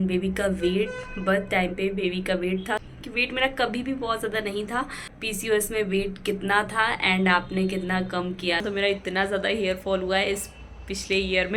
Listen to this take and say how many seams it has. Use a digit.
3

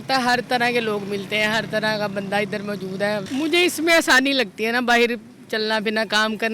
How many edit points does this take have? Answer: 1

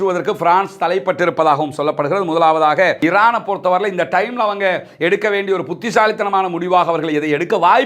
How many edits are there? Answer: 1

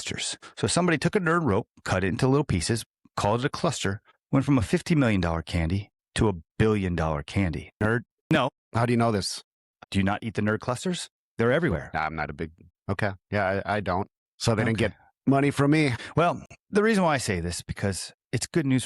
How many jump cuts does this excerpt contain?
1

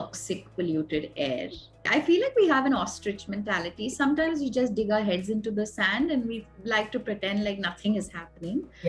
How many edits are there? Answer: 1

